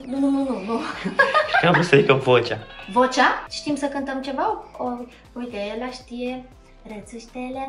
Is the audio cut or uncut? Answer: uncut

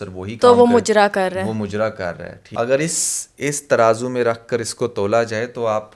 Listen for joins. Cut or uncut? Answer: cut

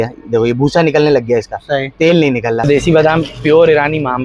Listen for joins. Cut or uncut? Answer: cut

